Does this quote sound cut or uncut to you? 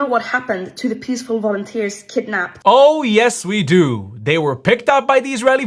cut